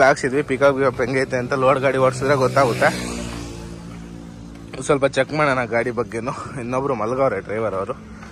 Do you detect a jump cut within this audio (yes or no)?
no